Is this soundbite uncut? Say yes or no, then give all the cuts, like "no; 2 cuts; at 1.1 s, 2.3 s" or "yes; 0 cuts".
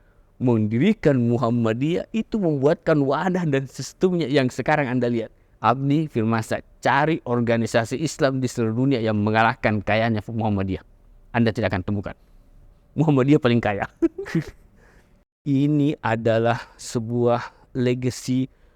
no; 1 cut; at 15.1 s